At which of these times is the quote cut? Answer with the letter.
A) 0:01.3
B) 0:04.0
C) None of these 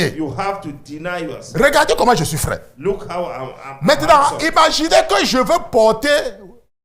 C